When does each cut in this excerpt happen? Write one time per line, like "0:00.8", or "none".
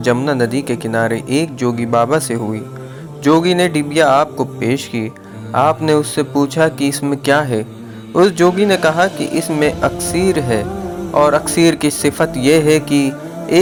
none